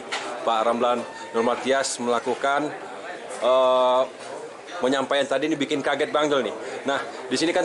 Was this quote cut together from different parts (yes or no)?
no